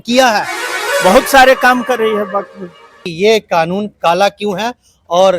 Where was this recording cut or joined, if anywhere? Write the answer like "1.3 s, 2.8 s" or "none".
3.0 s